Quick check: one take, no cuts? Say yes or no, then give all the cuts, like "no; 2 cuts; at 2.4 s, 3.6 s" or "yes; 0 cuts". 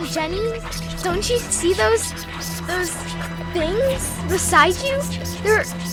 yes; 0 cuts